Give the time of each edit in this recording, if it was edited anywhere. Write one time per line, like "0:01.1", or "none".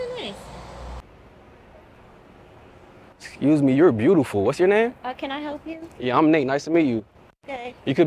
0:01.0